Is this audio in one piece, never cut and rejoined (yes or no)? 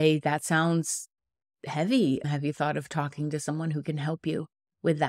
yes